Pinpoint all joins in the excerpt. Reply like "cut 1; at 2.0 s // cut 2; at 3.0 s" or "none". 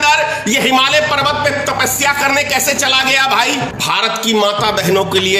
cut 1; at 3.8 s